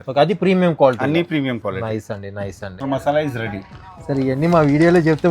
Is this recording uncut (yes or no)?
no